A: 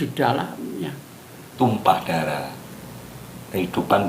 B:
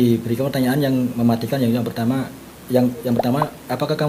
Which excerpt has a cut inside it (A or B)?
A